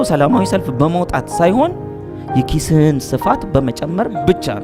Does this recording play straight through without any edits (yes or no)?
yes